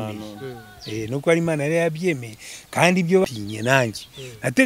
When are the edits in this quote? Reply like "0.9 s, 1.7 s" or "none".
3.2 s